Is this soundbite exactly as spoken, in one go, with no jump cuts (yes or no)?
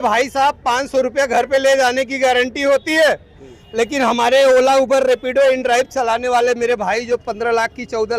yes